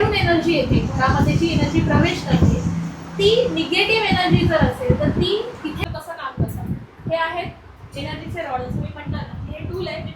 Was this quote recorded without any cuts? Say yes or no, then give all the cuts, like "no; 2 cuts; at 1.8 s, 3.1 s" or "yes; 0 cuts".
no; 1 cut; at 5.8 s